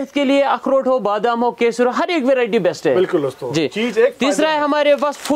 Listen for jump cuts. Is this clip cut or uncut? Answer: uncut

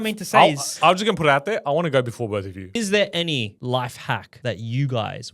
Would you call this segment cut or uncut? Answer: cut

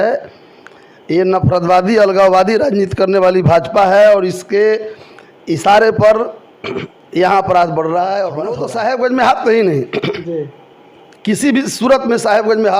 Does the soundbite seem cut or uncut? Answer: cut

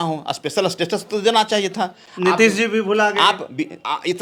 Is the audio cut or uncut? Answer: uncut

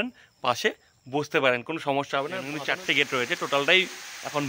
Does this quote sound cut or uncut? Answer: cut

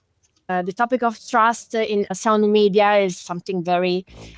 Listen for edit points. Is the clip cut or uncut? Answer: uncut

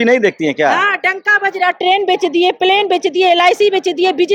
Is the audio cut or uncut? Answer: uncut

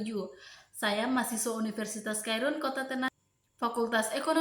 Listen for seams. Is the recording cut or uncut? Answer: cut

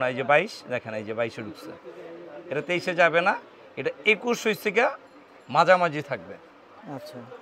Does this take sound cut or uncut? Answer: uncut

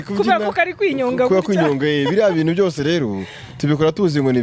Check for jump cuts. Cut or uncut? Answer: uncut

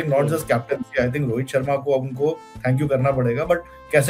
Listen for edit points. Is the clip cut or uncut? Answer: uncut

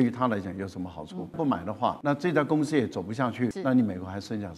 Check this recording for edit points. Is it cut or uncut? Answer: cut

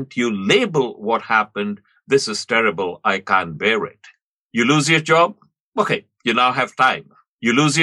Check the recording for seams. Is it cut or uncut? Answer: uncut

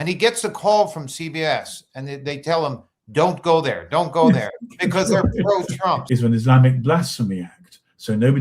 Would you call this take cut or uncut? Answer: cut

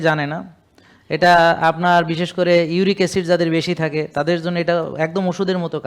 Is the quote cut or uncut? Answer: uncut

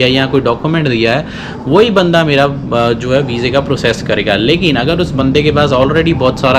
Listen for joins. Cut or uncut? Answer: uncut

